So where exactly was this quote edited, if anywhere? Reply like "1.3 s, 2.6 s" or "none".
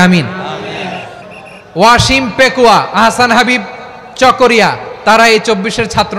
1.1 s